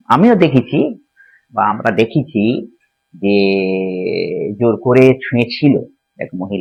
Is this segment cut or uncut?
uncut